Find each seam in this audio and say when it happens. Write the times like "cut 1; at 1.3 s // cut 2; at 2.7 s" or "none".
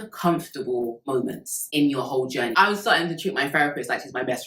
cut 1; at 2.5 s